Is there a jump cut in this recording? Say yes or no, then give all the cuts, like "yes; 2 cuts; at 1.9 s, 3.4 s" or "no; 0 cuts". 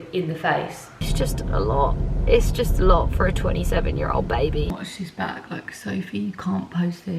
yes; 2 cuts; at 1.0 s, 4.7 s